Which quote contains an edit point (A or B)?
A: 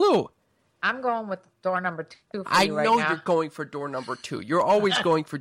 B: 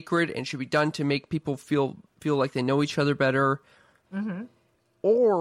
B